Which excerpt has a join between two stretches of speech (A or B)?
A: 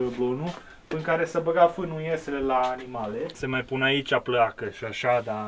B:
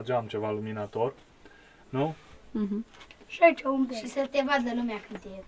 A